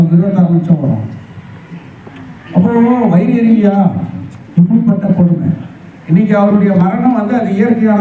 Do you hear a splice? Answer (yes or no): no